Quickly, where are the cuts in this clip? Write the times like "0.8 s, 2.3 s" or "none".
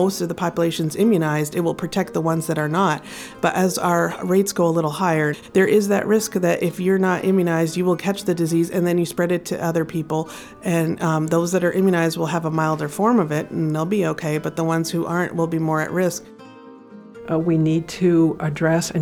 5.4 s, 16.8 s